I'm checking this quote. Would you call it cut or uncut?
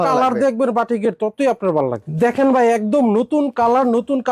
cut